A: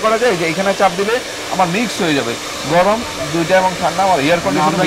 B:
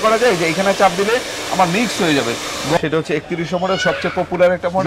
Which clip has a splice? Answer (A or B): B